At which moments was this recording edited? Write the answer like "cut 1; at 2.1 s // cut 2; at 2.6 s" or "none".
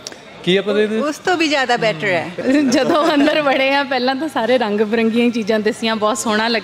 cut 1; at 2.4 s